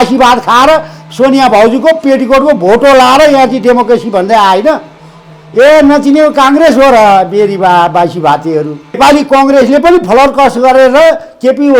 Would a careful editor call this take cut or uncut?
cut